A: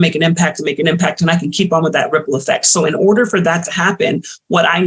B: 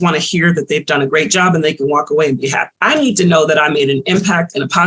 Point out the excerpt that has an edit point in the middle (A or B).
B